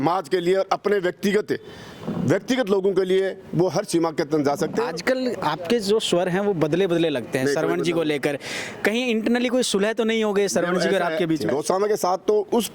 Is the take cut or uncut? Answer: cut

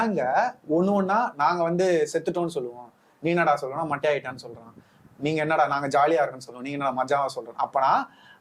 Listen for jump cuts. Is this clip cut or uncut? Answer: uncut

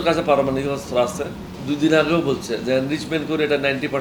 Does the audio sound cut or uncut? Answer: cut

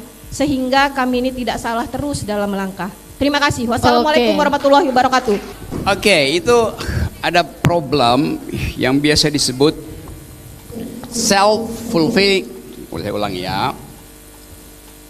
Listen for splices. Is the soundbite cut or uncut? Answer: uncut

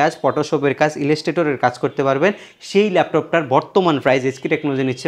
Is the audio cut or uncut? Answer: uncut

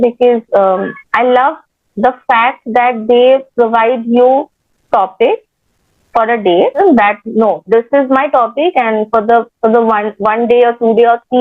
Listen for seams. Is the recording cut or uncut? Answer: cut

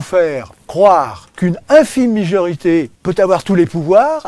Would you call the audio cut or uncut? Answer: cut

